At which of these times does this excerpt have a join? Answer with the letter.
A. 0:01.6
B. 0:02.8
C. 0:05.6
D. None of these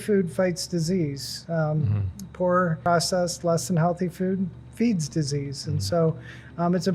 B